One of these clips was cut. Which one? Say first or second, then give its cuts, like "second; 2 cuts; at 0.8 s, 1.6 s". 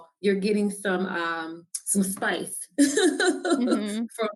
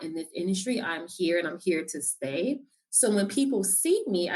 second; 1 cut; at 2.7 s